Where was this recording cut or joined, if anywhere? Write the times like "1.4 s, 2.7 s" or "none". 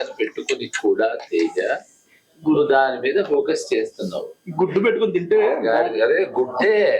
none